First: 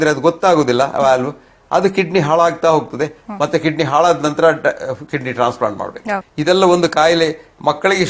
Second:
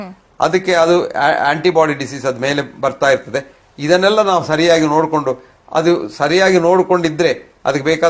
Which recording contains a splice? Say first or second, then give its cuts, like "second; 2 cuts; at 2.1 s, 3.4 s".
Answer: first; 1 cut; at 6.3 s